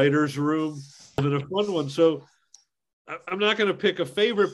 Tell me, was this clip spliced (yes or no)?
yes